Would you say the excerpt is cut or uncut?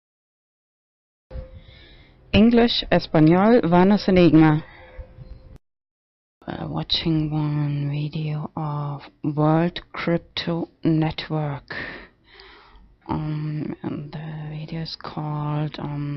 uncut